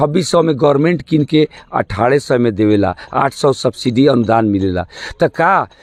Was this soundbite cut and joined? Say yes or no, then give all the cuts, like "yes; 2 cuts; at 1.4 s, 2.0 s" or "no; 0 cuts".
no; 0 cuts